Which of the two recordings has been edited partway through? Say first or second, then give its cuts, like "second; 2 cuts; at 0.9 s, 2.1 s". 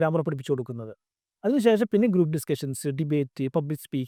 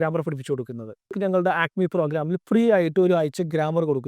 second; 1 cut; at 1.2 s